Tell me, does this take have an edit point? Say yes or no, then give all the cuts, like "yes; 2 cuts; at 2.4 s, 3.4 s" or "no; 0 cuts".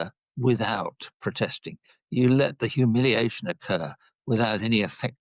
no; 0 cuts